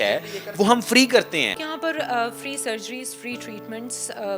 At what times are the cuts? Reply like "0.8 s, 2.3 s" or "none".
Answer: 1.6 s

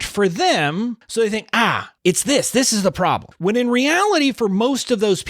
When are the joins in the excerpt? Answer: 1.0 s, 1.9 s, 3.3 s

